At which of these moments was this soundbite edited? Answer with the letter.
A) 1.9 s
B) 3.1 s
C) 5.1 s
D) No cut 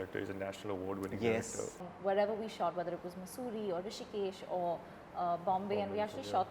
A